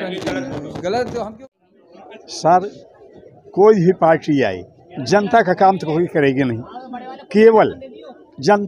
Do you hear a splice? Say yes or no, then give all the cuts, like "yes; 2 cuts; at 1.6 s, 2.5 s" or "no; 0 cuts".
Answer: yes; 1 cut; at 1.4 s